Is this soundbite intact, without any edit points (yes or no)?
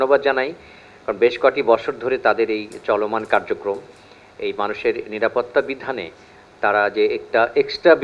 yes